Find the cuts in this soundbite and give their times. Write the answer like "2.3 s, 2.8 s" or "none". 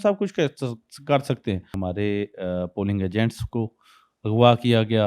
1.7 s